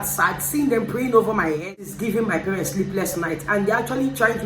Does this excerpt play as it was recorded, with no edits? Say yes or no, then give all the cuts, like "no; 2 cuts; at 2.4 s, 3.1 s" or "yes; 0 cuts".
no; 1 cut; at 1.8 s